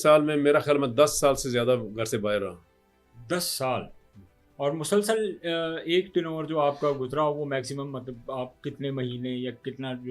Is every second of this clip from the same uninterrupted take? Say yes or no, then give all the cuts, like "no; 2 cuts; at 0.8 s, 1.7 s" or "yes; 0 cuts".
yes; 0 cuts